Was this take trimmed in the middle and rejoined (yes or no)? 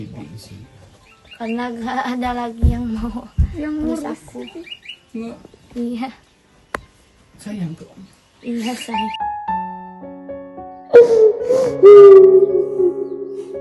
no